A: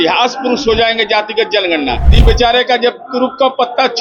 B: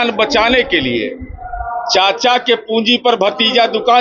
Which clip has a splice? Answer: A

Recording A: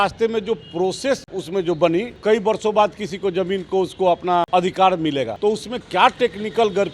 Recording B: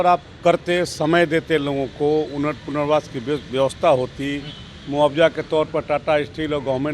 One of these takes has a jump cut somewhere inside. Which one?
A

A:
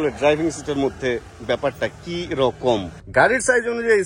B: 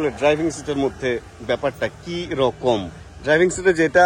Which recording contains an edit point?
A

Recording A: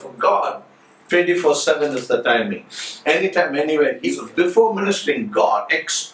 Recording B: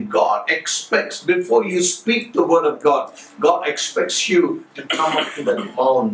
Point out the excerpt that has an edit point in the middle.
A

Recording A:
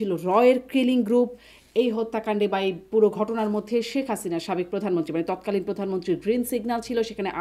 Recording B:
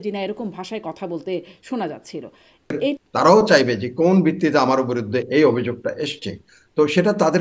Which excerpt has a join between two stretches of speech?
B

